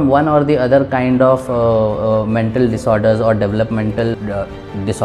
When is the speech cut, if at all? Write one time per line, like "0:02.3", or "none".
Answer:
0:04.2